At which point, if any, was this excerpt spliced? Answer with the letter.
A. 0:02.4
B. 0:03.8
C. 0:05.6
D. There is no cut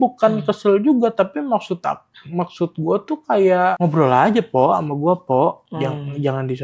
B